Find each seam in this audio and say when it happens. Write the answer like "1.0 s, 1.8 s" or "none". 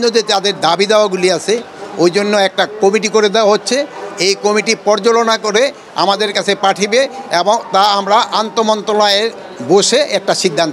none